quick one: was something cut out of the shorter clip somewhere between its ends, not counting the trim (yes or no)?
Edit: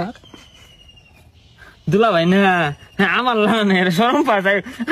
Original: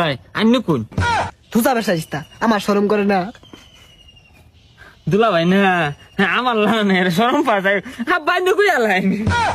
no